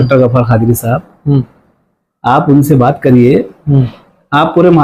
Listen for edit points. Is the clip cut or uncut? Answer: uncut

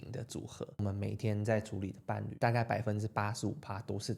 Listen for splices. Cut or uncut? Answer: cut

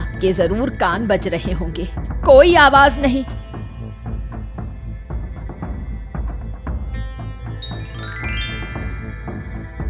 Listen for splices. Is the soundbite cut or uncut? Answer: cut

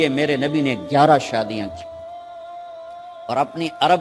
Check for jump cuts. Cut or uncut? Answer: cut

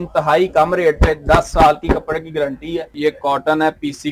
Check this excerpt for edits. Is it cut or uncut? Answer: cut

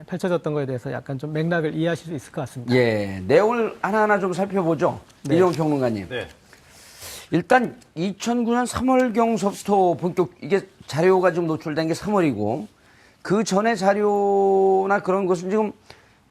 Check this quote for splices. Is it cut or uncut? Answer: uncut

